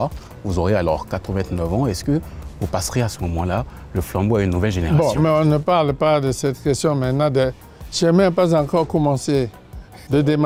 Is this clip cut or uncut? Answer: uncut